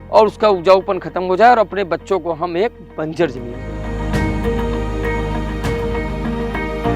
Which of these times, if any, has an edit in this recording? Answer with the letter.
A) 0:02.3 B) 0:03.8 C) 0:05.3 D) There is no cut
B